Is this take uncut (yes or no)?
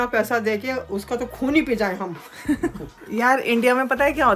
yes